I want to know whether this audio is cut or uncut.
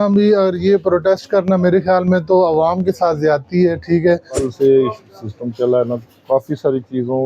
cut